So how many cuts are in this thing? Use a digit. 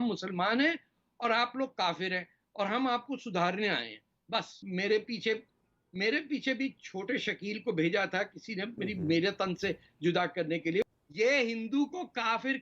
2